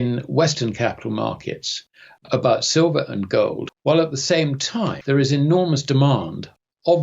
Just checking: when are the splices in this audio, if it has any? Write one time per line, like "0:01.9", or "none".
0:03.7
0:05.0